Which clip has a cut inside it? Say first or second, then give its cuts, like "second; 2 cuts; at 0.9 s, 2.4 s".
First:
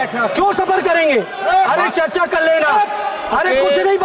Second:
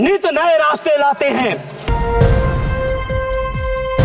second; 1 cut; at 1.8 s